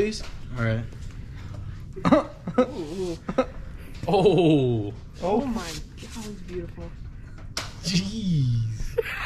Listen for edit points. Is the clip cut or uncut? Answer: uncut